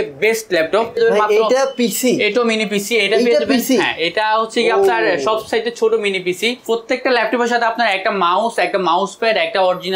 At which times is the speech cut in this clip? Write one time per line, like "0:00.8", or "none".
0:01.0
0:06.6